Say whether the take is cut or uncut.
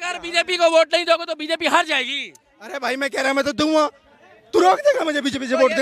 uncut